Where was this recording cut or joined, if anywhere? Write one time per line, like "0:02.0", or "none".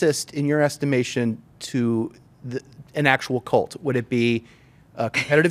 none